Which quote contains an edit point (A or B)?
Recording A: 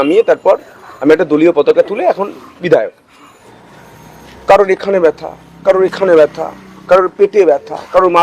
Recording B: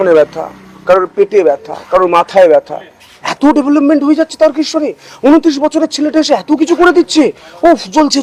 A